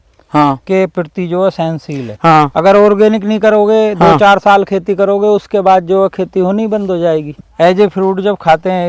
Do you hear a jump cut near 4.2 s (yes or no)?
no